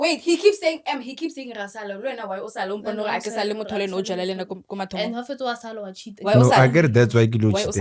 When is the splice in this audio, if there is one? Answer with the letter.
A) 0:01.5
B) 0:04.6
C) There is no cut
C